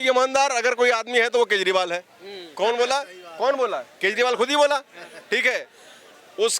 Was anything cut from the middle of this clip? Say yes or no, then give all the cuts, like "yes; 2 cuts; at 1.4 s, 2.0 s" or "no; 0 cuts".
no; 0 cuts